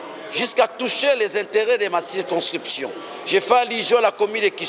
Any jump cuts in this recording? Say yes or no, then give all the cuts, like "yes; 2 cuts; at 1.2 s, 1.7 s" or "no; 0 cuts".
no; 0 cuts